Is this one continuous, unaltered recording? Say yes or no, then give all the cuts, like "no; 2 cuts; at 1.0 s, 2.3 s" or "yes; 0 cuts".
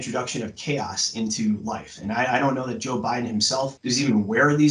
no; 1 cut; at 3.8 s